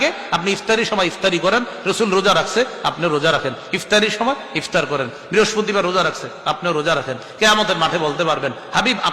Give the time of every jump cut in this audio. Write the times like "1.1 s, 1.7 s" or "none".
4.5 s